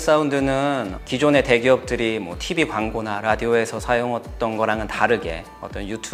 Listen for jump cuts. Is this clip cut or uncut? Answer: uncut